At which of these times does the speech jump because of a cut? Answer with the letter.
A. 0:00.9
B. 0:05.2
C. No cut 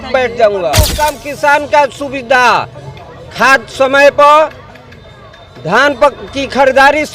A